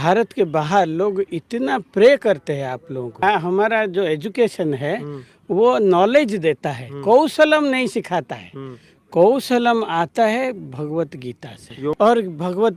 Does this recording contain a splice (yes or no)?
yes